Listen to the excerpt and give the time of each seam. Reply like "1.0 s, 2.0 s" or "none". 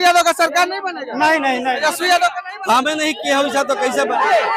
none